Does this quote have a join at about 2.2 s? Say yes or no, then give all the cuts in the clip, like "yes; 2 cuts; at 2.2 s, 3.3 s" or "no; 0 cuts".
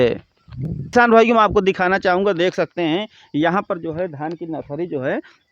no; 1 cut; at 0.9 s